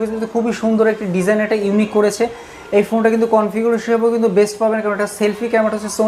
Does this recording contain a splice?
no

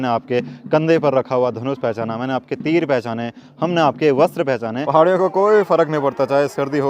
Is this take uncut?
no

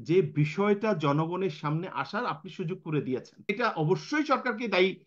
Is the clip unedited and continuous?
no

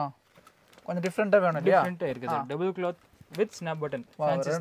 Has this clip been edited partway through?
no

